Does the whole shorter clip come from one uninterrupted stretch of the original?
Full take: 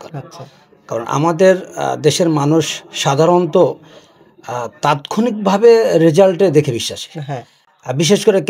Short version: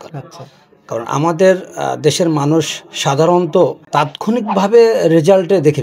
no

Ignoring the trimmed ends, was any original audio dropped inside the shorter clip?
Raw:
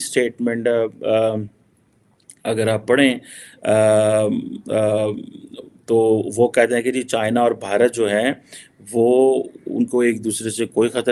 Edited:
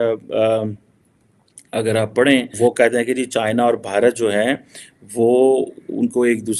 yes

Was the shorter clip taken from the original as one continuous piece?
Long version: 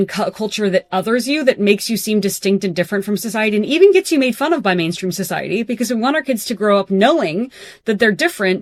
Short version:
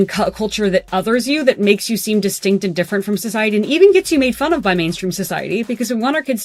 yes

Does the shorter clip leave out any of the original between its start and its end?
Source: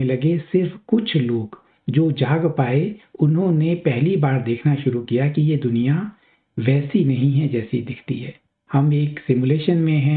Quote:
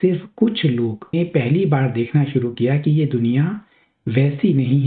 yes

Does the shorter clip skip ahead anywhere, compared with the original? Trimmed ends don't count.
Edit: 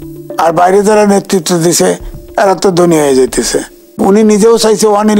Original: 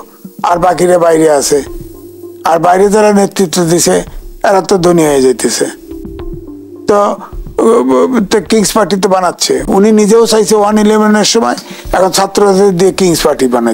yes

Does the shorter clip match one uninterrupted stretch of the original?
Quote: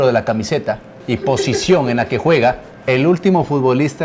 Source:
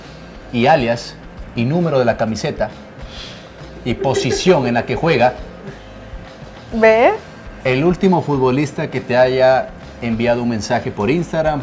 no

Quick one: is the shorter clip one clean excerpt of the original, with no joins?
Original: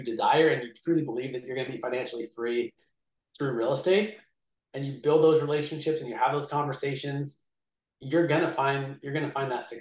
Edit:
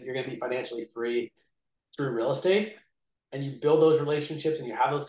yes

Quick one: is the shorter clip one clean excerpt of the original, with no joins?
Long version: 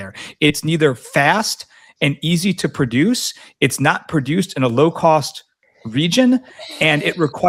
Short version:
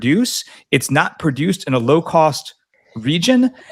yes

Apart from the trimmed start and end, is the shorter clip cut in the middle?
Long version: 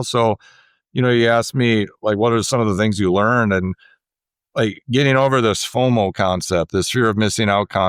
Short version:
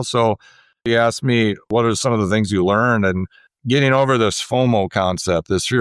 yes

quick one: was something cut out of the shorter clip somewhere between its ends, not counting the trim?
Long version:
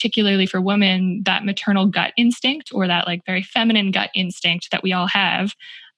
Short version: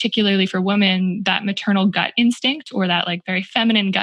no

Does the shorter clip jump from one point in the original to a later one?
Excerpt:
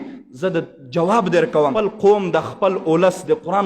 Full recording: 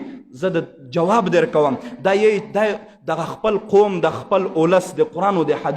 yes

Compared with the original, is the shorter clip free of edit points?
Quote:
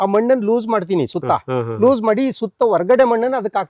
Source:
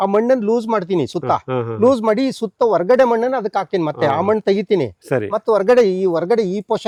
yes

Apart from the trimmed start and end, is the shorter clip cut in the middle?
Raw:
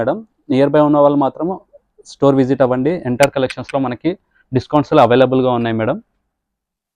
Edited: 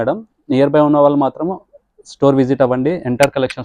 no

